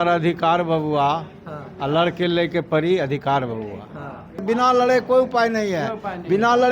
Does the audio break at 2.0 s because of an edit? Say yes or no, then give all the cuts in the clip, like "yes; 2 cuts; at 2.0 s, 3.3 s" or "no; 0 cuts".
no; 1 cut; at 4.4 s